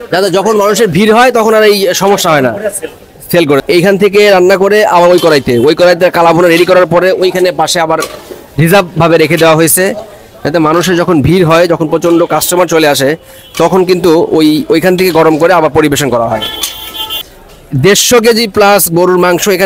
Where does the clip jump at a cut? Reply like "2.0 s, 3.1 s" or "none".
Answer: 3.6 s, 17.1 s